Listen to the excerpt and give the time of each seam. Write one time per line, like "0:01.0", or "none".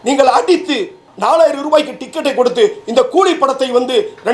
0:01.0